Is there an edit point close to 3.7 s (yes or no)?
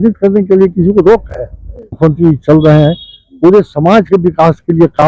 no